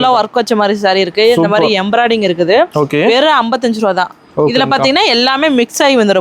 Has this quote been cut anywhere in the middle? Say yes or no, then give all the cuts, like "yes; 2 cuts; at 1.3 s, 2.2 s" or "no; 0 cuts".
no; 0 cuts